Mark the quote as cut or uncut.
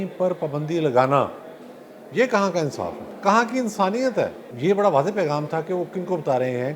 cut